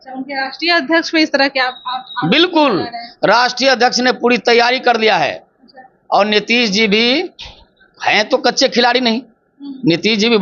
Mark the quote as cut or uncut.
uncut